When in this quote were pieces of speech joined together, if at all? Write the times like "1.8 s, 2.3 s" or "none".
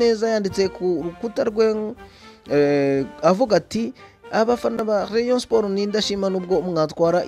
none